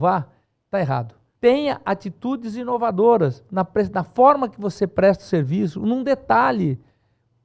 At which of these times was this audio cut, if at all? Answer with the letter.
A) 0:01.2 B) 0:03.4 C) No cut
A